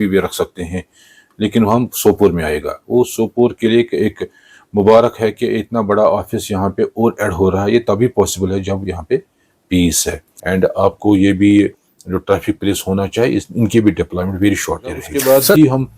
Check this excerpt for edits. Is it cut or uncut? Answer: cut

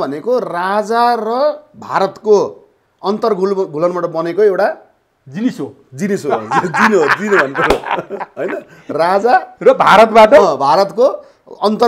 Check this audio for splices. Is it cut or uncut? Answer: uncut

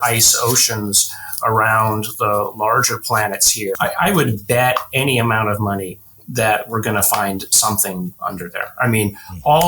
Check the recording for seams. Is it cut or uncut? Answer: cut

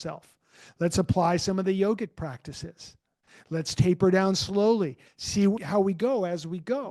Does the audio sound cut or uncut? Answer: cut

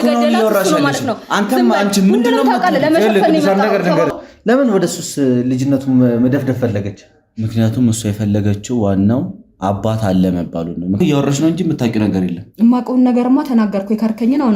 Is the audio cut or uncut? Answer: cut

